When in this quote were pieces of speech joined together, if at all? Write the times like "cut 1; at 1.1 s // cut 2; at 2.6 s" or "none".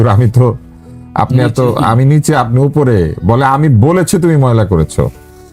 none